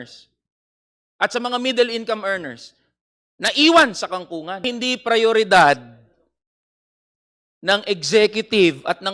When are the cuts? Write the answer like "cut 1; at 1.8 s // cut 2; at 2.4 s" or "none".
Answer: cut 1; at 4.7 s